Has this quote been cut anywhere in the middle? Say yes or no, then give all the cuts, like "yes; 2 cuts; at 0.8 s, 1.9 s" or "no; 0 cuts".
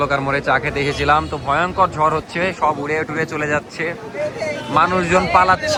no; 0 cuts